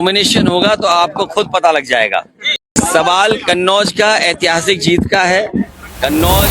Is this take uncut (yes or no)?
no